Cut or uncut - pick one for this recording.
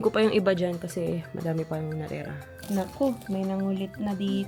uncut